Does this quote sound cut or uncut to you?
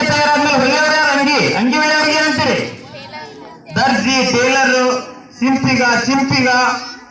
uncut